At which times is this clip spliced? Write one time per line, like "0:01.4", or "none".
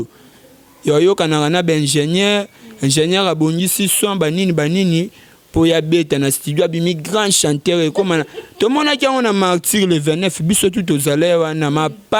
none